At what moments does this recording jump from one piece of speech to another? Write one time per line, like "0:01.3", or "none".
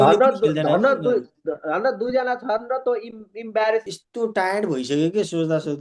0:03.8